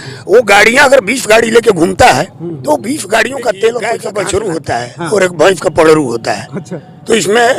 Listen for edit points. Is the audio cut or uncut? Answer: cut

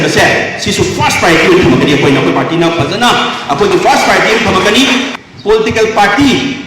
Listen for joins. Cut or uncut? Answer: cut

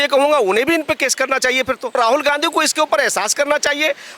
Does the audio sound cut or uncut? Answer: cut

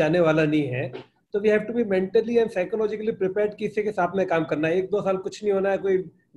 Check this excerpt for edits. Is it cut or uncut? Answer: uncut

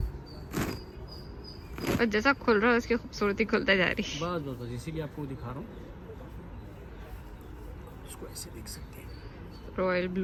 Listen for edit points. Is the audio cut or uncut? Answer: uncut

